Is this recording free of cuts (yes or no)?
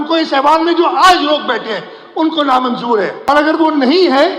no